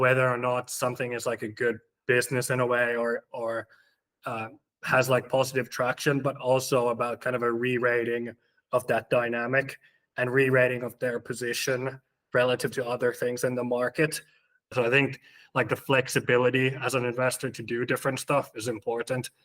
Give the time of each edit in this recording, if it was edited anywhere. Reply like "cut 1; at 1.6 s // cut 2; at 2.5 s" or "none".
cut 1; at 14.7 s